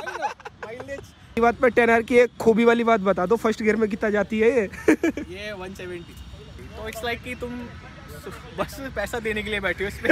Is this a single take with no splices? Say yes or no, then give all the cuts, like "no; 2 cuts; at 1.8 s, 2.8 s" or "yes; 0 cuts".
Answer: no; 2 cuts; at 1.4 s, 6.5 s